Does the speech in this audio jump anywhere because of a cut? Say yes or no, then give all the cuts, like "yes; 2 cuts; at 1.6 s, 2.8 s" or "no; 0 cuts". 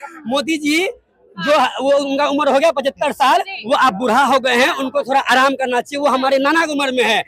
no; 0 cuts